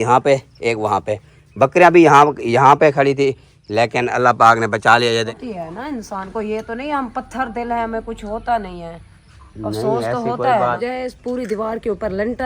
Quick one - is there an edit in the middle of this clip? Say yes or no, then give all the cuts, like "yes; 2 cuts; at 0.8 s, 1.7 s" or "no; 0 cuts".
yes; 2 cuts; at 5.3 s, 10.8 s